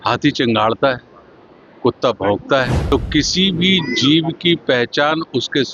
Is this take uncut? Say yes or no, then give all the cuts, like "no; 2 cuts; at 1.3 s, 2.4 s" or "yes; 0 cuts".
no; 1 cut; at 2.8 s